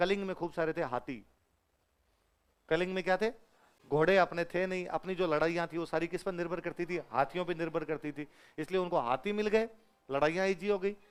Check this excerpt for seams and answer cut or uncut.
uncut